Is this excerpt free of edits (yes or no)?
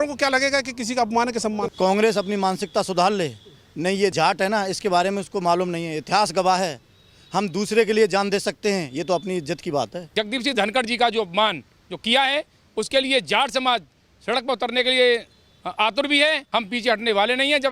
no